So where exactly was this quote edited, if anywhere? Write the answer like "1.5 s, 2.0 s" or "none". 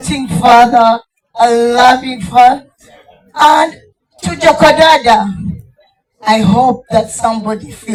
none